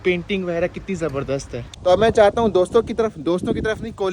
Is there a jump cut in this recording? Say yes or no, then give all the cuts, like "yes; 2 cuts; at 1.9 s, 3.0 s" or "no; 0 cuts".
yes; 1 cut; at 1.6 s